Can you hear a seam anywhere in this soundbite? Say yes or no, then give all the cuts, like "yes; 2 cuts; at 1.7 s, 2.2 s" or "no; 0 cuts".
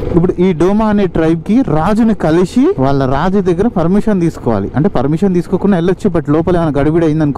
yes; 1 cut; at 2.8 s